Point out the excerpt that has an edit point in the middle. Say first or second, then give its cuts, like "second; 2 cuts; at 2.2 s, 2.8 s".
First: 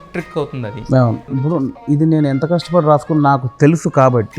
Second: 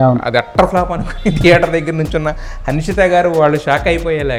first; 1 cut; at 1.3 s